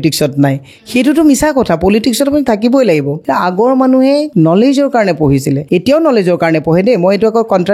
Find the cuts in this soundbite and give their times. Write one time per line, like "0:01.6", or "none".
0:03.2
0:04.3
0:05.6